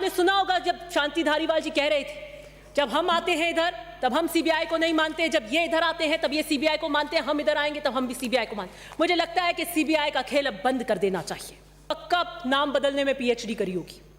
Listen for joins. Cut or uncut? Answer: cut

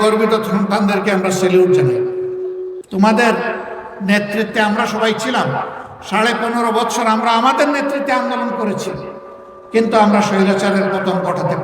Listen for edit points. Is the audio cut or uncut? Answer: cut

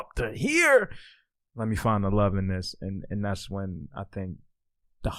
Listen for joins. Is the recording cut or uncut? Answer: uncut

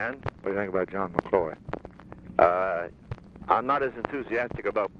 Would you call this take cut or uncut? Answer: uncut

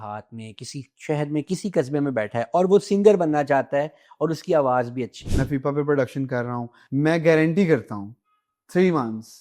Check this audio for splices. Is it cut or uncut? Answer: cut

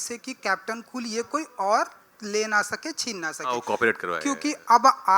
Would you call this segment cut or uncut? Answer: uncut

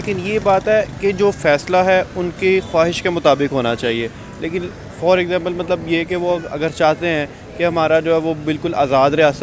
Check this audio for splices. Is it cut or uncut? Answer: uncut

